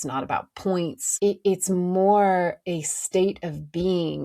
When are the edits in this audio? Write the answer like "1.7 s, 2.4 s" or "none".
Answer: 1.0 s